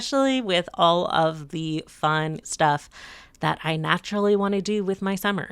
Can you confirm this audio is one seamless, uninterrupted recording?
no; 1 cut; at 2.5 s

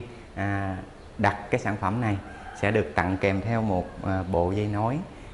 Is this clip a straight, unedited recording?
yes; 0 cuts

